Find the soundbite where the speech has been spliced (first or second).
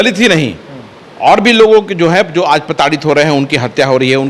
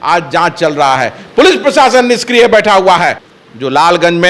second